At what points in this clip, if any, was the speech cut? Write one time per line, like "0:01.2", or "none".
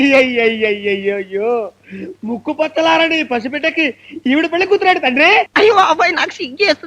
0:05.5

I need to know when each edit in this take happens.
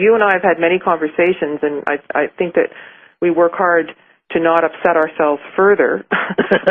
0:04.9

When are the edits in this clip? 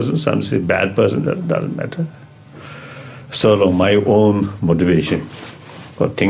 none

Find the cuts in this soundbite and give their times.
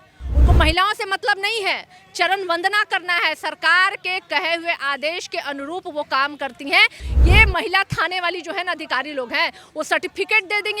0:07.0

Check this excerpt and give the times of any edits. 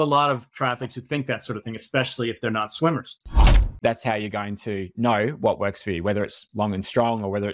0:03.7

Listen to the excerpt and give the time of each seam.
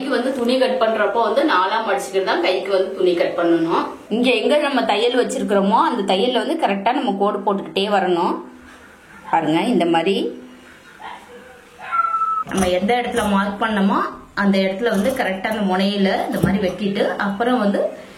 0:04.0
0:12.4

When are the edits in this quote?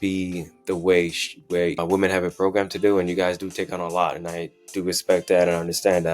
0:01.8

